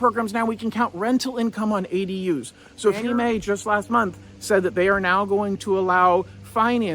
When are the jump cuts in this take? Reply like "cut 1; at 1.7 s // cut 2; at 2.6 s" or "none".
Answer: cut 1; at 3.0 s